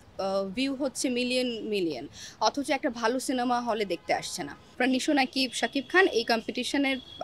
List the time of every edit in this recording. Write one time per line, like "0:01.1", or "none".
0:04.7